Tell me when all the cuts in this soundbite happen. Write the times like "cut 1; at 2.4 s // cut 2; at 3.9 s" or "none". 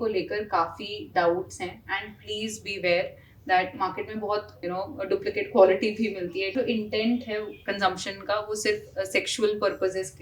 cut 1; at 4.5 s // cut 2; at 6.5 s

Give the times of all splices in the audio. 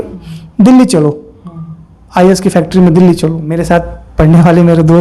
cut 1; at 3.5 s

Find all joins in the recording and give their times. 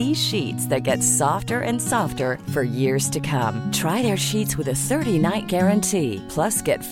none

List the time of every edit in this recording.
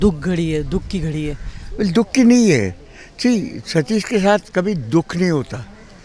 none

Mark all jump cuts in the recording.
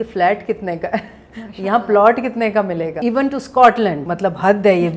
cut 1; at 2.9 s // cut 2; at 4.1 s

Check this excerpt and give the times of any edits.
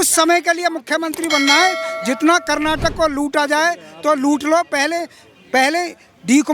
none

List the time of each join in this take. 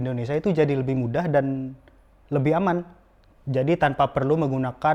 none

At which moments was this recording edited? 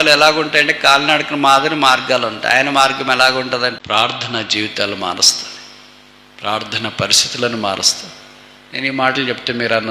cut 1; at 3.8 s

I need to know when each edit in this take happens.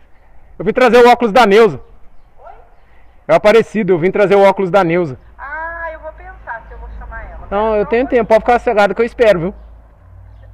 none

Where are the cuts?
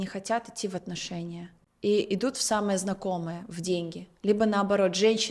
none

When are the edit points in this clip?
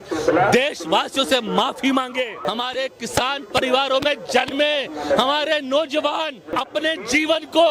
cut 1; at 2.5 s // cut 2; at 6.6 s

